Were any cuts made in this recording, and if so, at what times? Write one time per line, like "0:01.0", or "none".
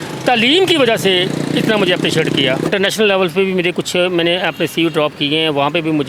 0:02.7